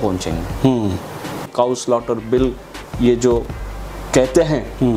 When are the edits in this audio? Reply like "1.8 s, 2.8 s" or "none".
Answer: 1.4 s